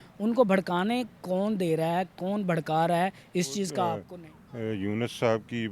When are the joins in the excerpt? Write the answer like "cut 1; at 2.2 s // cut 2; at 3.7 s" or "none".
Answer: cut 1; at 4.0 s